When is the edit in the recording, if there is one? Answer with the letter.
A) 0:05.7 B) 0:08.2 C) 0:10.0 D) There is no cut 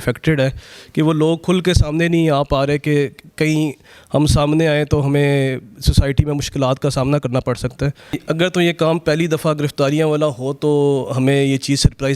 B